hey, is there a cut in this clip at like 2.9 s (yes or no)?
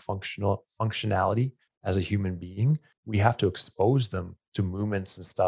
yes